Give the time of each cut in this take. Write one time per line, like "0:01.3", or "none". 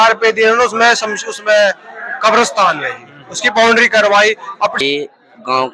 0:04.8